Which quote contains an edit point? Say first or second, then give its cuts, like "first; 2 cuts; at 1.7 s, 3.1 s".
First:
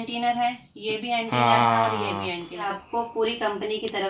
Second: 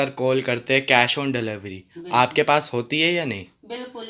first; 1 cut; at 2.8 s